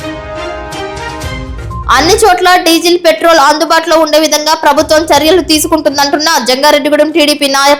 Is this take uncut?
yes; 0 cuts

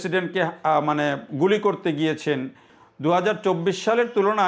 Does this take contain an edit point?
yes; 1 cut; at 2.7 s

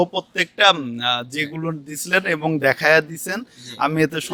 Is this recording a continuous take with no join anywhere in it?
yes; 0 cuts

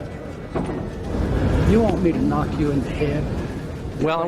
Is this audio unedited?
no; 1 cut; at 1.1 s

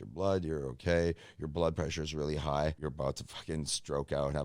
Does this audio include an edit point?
yes; 1 cut; at 2.8 s

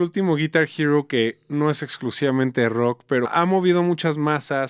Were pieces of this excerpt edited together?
yes; 1 cut; at 3.3 s

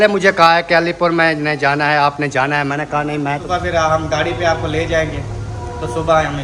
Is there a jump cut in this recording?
yes; 1 cut; at 3.4 s

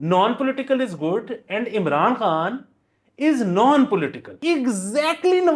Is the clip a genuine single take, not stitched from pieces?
no; 1 cut; at 4.3 s

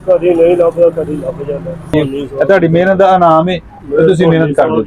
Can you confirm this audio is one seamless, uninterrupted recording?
no; 1 cut; at 1.9 s

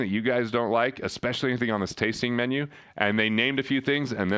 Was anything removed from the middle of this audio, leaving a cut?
no; 0 cuts

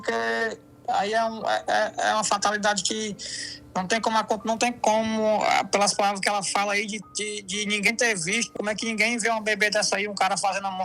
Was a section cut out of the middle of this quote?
yes; 1 cut; at 8.5 s

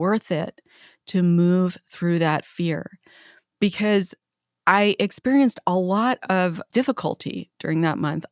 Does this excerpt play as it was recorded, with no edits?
no; 1 cut; at 6.7 s

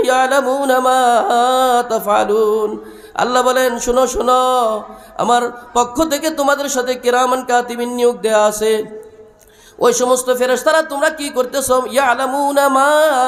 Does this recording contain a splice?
no; 0 cuts

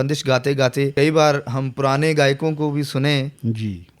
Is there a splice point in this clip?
yes; 1 cut; at 0.9 s

